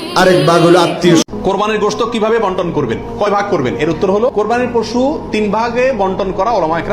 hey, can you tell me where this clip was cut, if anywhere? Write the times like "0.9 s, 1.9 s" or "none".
1.2 s